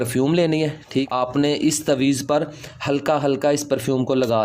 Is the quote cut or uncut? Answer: cut